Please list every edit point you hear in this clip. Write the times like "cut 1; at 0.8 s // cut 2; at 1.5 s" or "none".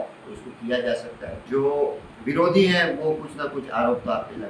cut 1; at 1.4 s // cut 2; at 2.1 s